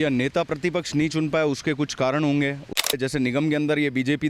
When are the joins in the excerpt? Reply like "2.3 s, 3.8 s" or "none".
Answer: 2.9 s